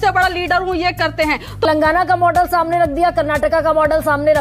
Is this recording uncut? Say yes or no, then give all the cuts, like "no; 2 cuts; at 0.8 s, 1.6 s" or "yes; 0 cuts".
no; 1 cut; at 1.7 s